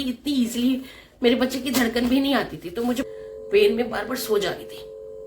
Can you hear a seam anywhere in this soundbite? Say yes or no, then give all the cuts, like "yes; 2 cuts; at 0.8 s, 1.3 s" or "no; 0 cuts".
yes; 1 cut; at 3.1 s